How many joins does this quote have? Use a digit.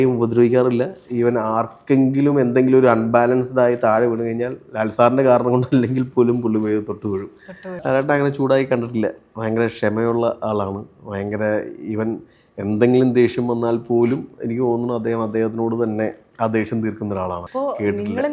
2